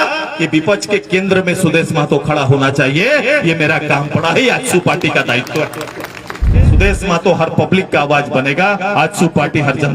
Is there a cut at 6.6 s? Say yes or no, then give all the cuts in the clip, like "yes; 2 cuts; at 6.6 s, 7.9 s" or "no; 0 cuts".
yes; 1 cut; at 6.6 s